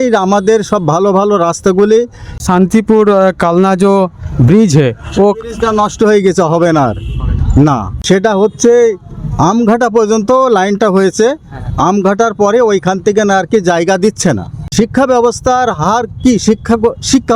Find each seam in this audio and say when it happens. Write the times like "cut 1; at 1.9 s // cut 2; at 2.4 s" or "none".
cut 1; at 2.4 s // cut 2; at 8.0 s // cut 3; at 14.6 s